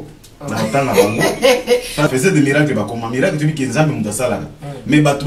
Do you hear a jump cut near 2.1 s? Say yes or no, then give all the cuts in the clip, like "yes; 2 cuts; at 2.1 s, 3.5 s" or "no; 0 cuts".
yes; 1 cut; at 2.1 s